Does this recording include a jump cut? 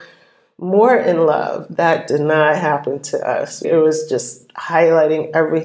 no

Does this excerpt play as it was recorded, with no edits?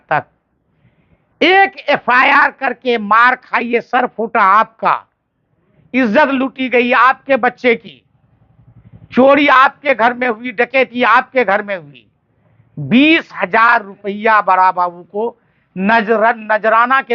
yes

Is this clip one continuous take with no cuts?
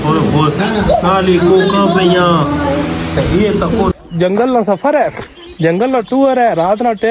no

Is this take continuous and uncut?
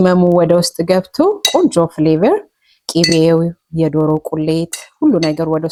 yes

